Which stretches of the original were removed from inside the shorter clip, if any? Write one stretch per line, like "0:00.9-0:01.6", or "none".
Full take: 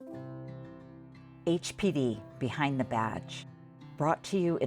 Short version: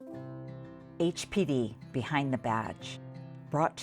0:00.9-0:01.4